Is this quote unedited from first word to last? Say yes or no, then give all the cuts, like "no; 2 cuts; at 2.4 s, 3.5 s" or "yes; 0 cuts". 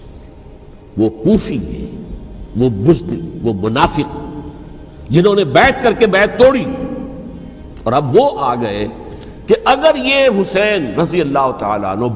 yes; 0 cuts